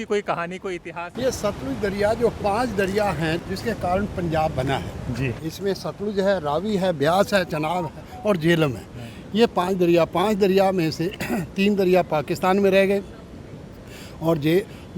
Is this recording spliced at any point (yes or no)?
yes